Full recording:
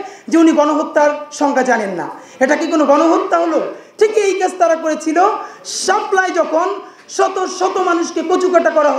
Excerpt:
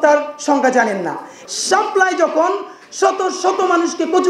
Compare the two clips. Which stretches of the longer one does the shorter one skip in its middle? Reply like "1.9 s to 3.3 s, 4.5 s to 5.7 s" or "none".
2.2 s to 5.5 s